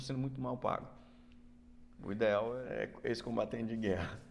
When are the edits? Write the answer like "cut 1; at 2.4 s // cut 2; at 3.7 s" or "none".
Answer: cut 1; at 2.6 s